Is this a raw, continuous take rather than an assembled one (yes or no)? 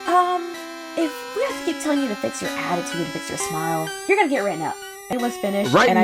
no